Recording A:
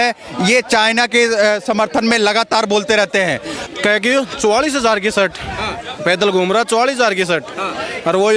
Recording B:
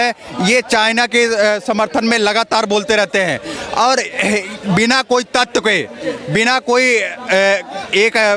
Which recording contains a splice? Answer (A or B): A